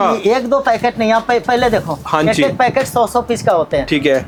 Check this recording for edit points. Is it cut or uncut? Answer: uncut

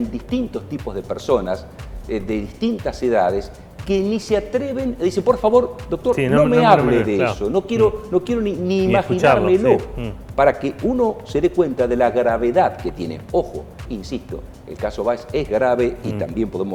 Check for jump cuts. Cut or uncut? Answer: uncut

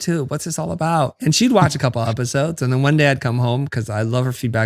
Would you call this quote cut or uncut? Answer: cut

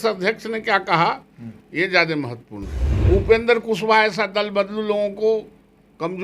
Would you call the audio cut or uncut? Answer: cut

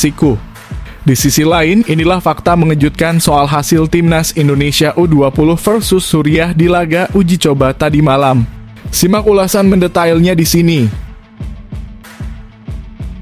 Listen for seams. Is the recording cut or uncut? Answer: cut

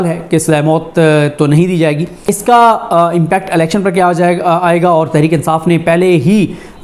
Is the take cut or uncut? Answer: cut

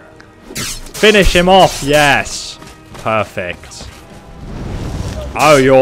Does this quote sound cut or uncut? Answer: uncut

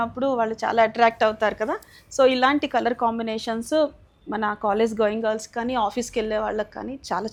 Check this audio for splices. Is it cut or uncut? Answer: uncut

